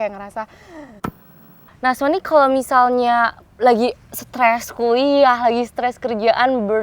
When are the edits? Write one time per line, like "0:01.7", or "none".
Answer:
0:01.3

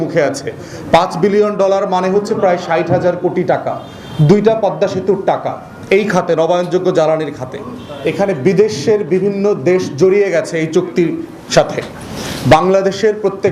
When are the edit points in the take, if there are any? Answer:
0:07.9

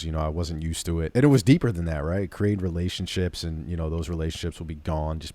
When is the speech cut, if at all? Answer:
0:01.1

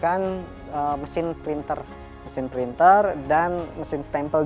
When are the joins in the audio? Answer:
none

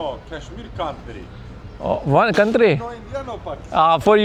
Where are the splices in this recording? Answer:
none

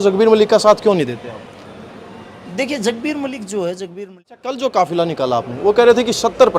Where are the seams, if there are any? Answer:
0:03.9

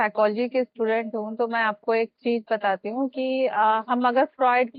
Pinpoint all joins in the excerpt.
none

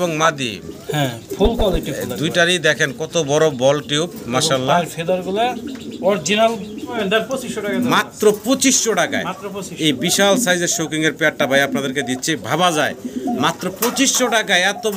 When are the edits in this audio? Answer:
0:07.0

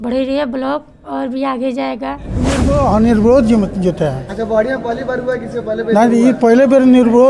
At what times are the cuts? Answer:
0:02.5

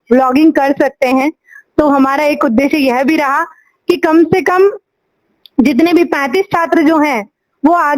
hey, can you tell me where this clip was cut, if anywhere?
none

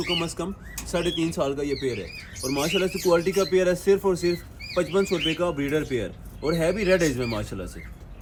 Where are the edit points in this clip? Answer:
none

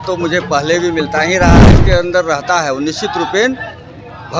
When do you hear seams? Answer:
0:01.7

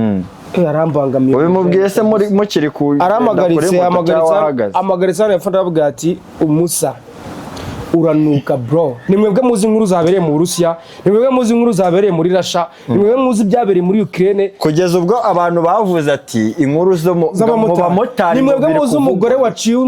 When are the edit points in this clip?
0:09.0

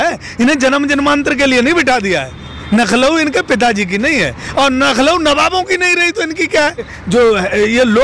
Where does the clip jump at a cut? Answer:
0:06.9

